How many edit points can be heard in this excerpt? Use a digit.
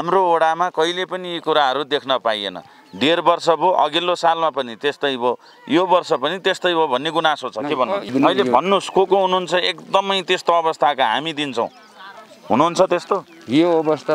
1